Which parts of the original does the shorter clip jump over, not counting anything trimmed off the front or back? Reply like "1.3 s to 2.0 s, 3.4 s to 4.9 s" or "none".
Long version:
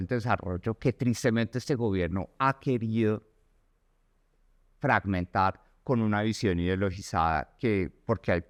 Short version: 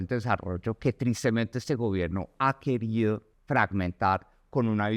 3.3 s to 4.7 s